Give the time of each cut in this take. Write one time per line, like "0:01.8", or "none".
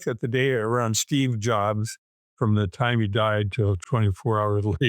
0:03.8